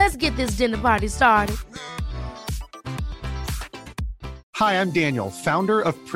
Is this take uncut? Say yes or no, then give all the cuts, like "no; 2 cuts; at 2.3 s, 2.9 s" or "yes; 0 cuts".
no; 1 cut; at 4.4 s